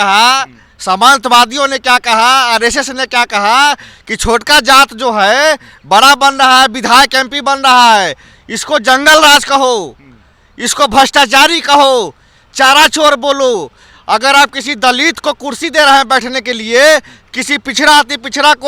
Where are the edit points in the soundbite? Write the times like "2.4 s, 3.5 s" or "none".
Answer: none

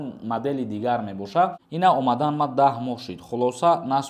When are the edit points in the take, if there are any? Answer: 1.6 s

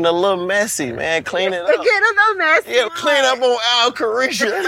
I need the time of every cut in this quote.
2.9 s

